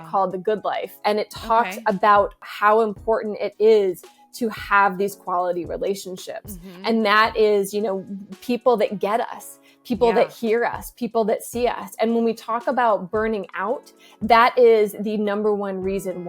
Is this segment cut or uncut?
cut